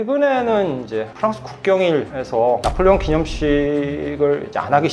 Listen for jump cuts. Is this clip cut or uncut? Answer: uncut